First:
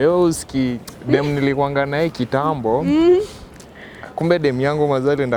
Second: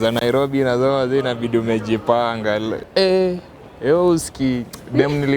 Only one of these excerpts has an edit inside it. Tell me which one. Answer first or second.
second